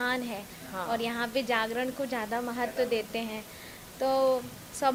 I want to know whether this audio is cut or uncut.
uncut